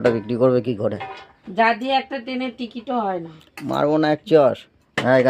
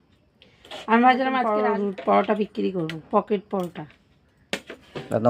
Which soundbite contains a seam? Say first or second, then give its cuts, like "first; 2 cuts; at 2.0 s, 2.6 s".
second; 1 cut; at 1.5 s